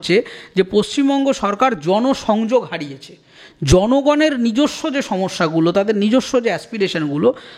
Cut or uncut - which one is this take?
uncut